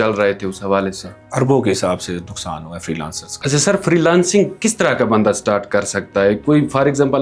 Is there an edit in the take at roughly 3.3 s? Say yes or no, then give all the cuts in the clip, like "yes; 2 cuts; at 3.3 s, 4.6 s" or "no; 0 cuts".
yes; 1 cut; at 3.3 s